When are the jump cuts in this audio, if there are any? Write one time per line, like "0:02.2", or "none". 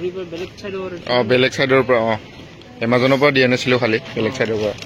none